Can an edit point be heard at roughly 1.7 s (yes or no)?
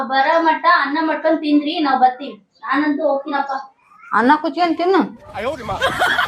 no